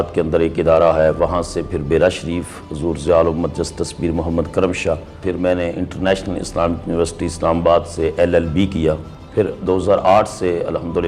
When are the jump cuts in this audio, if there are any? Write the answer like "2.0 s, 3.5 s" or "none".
5.2 s, 9.1 s